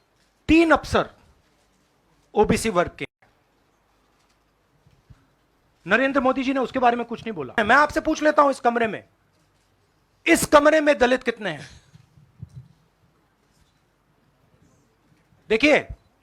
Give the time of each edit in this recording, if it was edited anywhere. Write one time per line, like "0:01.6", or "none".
0:07.5